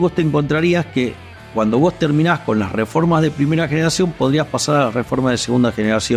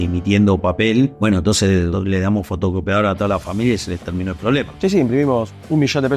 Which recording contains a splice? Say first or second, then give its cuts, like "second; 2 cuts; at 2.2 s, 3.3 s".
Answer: second; 2 cuts; at 1.6 s, 4.7 s